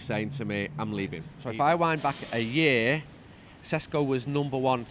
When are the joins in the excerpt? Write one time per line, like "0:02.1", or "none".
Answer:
0:01.3